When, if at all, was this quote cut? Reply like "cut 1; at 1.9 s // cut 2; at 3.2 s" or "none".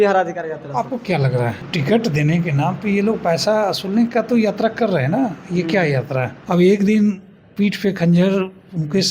cut 1; at 1.6 s // cut 2; at 6.4 s